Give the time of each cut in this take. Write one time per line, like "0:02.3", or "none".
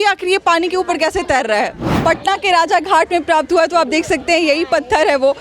0:01.8